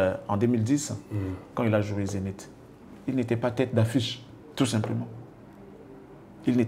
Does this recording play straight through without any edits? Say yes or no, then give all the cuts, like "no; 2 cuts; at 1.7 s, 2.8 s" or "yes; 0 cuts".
yes; 0 cuts